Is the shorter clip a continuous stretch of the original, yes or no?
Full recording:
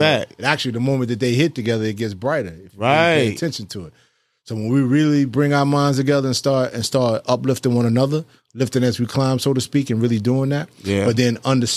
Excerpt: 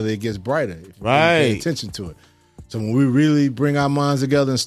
yes